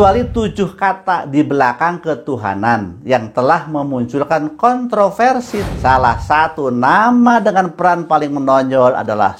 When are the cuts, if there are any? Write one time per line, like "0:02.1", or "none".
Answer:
0:05.6